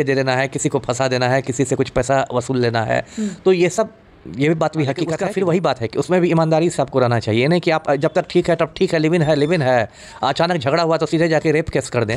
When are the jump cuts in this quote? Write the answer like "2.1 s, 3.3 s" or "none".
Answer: 5.1 s